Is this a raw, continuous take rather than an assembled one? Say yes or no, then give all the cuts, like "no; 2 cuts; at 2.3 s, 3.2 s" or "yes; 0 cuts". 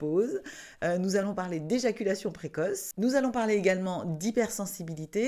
yes; 0 cuts